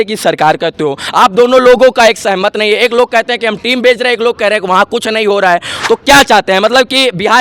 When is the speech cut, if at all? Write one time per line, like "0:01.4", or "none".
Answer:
none